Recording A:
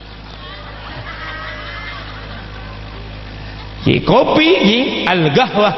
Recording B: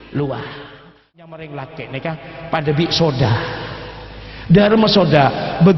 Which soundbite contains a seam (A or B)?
B